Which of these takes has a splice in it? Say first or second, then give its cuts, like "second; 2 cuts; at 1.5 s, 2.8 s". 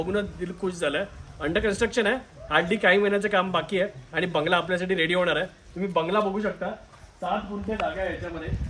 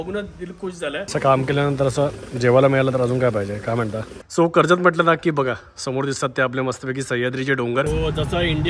second; 3 cuts; at 1.0 s, 4.2 s, 7.9 s